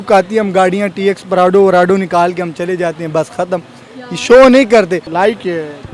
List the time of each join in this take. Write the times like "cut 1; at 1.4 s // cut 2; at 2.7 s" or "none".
cut 1; at 5.0 s